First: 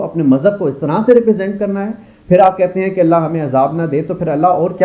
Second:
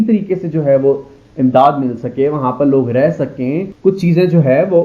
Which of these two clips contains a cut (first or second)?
second